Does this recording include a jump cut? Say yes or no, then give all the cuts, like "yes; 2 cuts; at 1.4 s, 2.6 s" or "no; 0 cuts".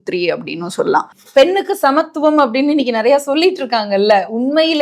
yes; 1 cut; at 1.2 s